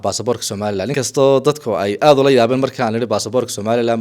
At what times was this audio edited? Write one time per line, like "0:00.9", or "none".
0:00.9